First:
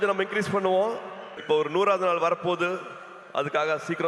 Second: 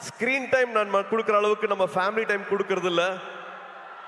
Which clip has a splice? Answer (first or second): first